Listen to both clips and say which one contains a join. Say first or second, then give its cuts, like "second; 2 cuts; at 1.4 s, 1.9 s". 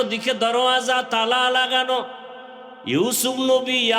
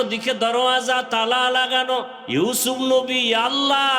second; 1 cut; at 2.2 s